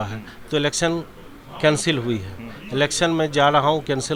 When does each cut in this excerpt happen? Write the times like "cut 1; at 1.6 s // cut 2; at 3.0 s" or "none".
none